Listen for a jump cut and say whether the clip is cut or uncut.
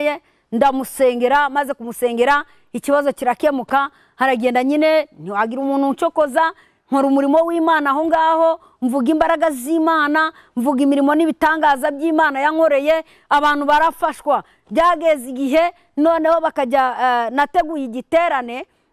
uncut